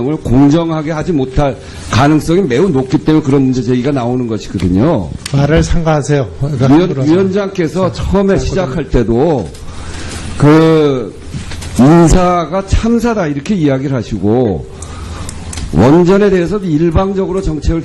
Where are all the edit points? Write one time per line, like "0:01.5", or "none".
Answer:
0:12.9